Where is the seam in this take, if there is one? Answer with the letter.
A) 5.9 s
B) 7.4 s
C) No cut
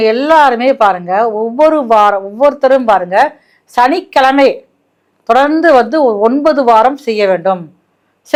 C